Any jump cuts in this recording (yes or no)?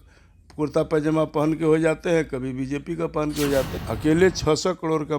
yes